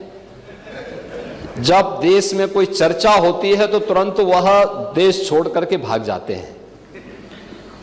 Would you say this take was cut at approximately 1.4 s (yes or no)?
no